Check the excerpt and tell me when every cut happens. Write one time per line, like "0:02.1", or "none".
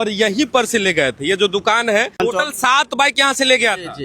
0:02.2